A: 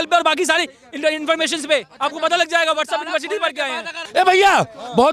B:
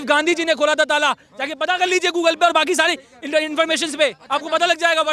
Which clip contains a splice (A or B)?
A